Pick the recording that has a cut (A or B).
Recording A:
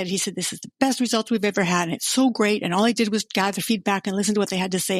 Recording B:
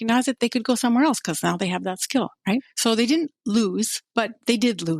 B